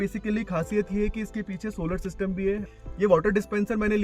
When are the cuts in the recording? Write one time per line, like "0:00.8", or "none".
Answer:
0:02.6